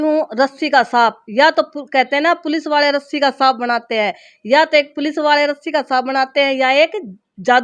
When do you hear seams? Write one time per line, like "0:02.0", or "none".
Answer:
none